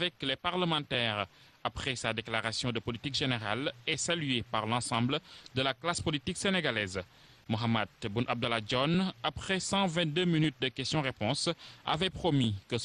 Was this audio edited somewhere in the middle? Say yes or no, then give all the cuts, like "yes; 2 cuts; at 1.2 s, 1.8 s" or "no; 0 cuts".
no; 0 cuts